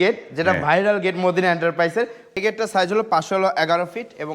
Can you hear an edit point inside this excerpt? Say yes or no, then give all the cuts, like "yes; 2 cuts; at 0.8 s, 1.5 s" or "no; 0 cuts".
yes; 1 cut; at 2.3 s